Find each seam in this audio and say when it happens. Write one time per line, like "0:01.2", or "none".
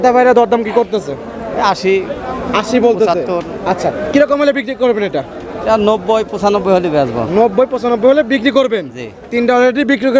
none